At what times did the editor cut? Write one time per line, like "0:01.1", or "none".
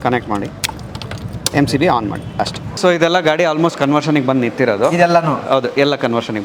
0:02.6